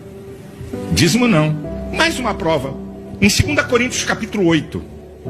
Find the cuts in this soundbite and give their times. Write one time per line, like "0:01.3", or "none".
0:01.8